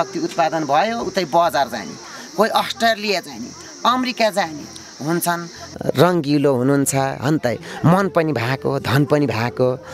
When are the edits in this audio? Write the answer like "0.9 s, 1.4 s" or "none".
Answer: 5.7 s